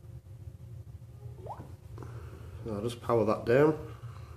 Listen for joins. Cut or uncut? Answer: uncut